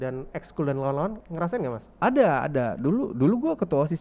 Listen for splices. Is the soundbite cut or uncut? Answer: cut